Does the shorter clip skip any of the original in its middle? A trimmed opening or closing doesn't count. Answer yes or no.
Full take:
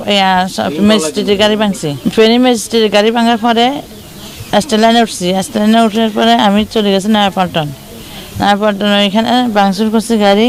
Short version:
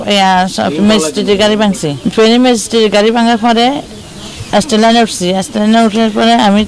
no